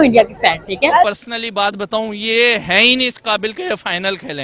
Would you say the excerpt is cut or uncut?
cut